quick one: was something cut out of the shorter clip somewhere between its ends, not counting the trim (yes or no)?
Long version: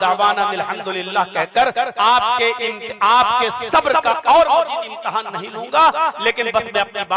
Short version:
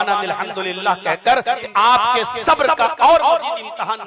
yes